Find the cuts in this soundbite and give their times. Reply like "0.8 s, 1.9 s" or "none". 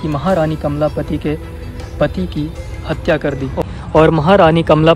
3.6 s